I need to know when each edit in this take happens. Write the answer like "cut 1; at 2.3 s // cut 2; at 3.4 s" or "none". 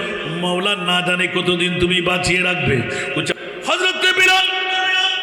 cut 1; at 3.4 s